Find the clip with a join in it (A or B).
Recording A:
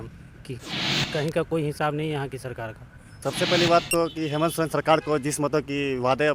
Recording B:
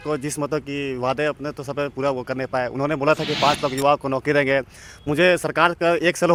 A